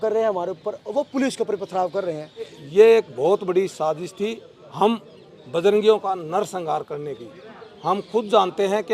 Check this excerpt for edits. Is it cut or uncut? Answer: cut